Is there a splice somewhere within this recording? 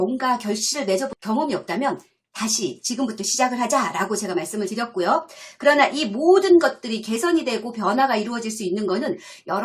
yes; 1 cut; at 1.2 s

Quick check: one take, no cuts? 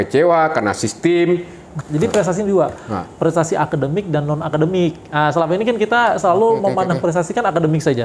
no; 1 cut; at 1.7 s

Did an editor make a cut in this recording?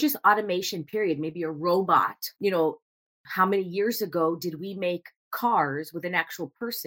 yes; 1 cut; at 2.3 s

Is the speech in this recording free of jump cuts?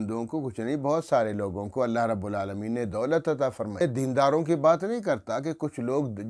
no; 1 cut; at 3.8 s

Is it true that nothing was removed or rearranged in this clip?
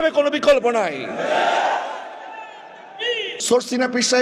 no; 1 cut; at 3.3 s

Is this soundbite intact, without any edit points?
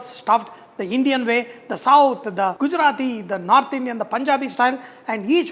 no; 1 cut; at 2.5 s

